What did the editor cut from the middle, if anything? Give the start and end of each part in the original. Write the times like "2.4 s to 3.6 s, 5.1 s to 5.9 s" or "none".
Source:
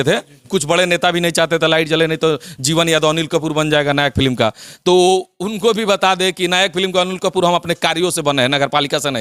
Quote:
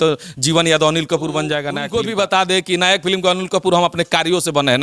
4.0 s to 5.4 s